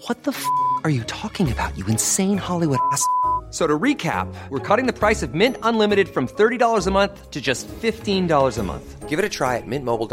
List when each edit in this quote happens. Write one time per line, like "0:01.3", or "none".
none